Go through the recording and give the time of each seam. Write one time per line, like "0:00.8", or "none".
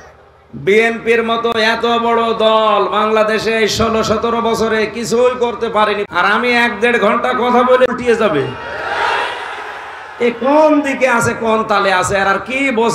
0:01.5
0:06.1
0:07.9